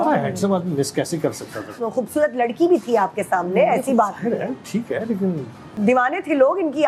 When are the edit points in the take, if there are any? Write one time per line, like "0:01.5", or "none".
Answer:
0:01.7
0:05.8